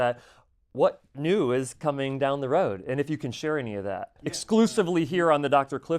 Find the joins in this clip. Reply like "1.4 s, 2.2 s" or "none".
4.4 s